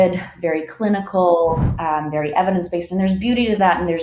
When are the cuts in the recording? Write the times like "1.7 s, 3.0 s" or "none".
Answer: none